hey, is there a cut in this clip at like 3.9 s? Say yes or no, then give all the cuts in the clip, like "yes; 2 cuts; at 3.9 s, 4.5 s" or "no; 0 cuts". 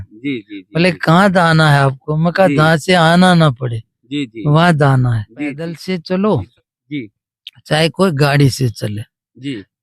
no; 1 cut; at 5.8 s